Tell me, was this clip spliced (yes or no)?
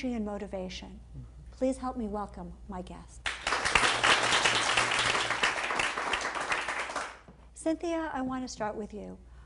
no